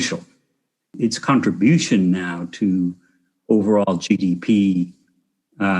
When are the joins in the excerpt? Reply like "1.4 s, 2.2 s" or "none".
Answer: 1.0 s